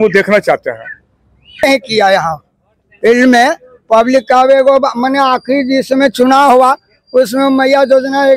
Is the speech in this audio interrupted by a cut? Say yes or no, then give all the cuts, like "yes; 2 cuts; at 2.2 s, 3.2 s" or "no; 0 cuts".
yes; 1 cut; at 1.6 s